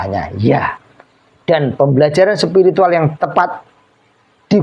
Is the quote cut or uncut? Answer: uncut